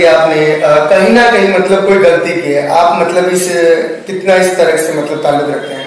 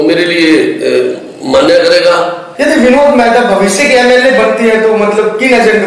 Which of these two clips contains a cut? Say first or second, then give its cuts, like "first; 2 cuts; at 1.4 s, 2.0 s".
second; 1 cut; at 2.5 s